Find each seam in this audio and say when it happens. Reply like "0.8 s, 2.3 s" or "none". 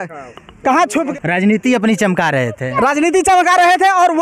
1.0 s